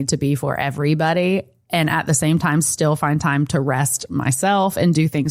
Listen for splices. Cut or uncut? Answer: uncut